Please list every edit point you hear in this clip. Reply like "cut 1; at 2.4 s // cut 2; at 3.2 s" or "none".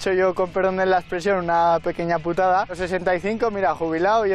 cut 1; at 2.8 s

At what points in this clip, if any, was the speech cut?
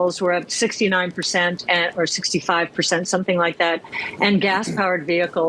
none

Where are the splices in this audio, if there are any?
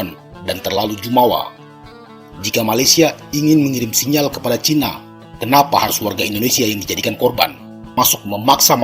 cut 1; at 7.9 s

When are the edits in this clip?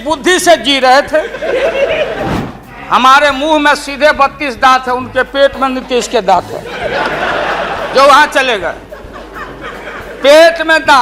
cut 1; at 2.4 s

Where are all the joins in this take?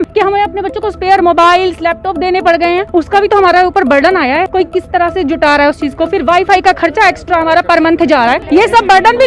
none

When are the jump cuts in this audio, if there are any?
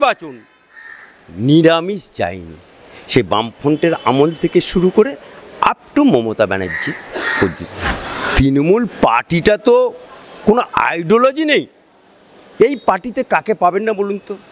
cut 1; at 7.9 s

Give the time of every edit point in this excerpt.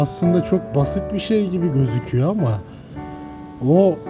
none

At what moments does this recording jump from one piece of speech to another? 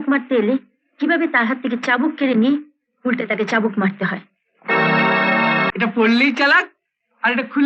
cut 1; at 5.7 s

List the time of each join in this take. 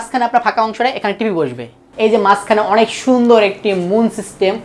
cut 1; at 1.8 s

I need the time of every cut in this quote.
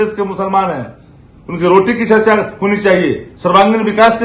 cut 1; at 3.3 s

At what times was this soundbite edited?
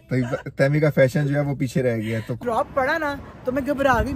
cut 1; at 2.4 s

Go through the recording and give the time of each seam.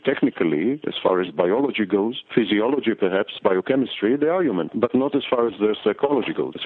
none

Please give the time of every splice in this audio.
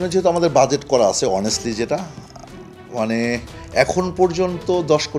none

